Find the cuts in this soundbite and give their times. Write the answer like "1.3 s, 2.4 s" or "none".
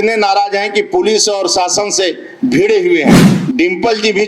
3.3 s